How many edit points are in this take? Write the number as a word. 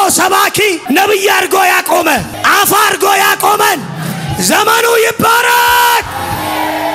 two